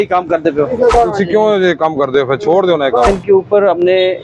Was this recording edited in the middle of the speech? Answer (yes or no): yes